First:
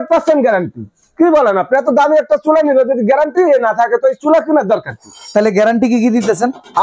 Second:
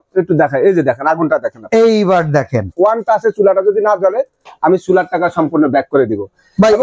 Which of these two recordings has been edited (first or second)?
second